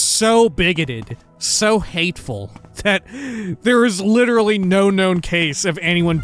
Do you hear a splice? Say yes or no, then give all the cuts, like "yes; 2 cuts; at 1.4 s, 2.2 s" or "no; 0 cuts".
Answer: no; 0 cuts